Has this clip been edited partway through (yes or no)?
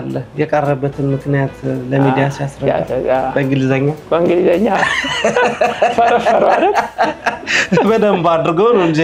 no